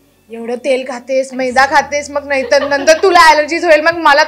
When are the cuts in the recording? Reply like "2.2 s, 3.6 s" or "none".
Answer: none